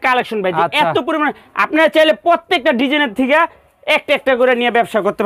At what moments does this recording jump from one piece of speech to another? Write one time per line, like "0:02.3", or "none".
none

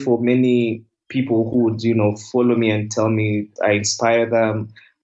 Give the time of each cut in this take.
0:03.5

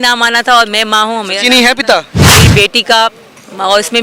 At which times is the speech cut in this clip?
0:02.3

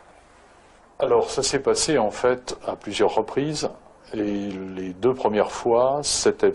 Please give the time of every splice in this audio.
0:05.6

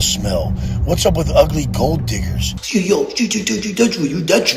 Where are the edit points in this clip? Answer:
0:02.5

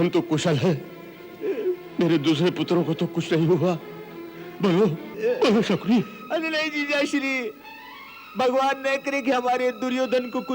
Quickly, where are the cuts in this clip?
0:01.8
0:05.1

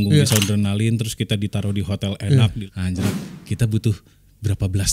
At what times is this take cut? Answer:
0:02.6

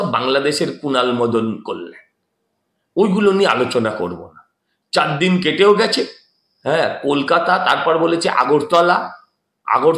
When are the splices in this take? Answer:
none

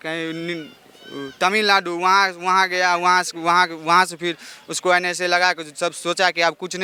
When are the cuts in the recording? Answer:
none

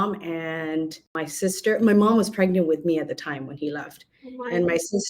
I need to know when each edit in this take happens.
0:01.0

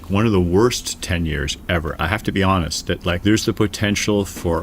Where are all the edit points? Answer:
0:03.2

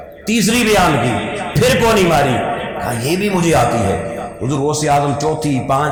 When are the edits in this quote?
none

